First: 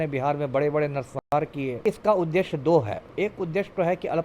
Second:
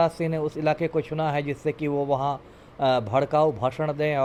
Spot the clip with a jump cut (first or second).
first